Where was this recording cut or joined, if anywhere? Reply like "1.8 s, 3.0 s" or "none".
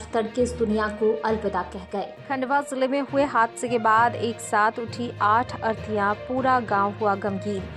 2.2 s